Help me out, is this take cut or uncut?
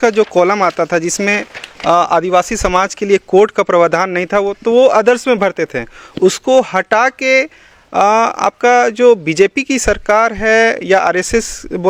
uncut